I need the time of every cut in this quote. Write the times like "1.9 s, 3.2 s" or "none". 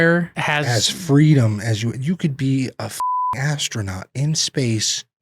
none

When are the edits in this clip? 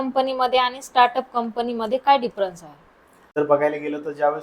3.3 s

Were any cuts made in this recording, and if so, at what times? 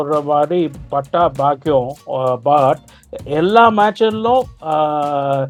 none

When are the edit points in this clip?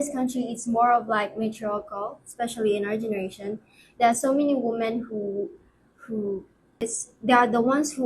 6.8 s

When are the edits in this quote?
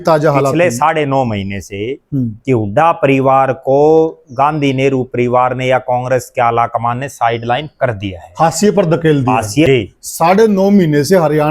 9.7 s

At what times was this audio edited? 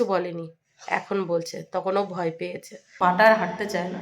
2.9 s

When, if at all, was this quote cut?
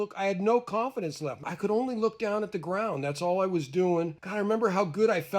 1.3 s, 4.2 s

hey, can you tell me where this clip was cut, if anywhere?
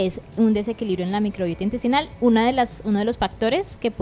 none

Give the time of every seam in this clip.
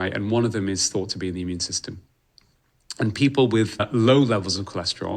3.8 s

